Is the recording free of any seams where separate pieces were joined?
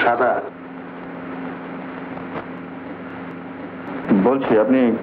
no; 1 cut; at 4.0 s

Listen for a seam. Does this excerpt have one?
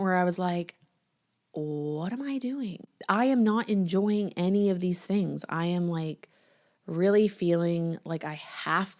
yes; 1 cut; at 2.9 s

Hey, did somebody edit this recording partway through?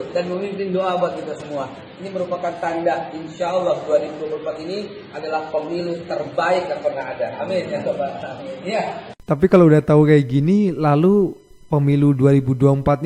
no; 0 cuts

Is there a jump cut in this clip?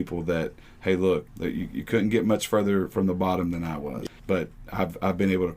yes; 2 cuts; at 1.3 s, 4.0 s

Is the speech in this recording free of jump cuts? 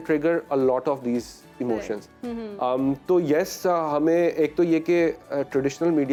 yes; 0 cuts

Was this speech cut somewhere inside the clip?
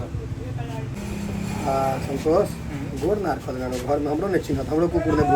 yes; 1 cut; at 1.0 s

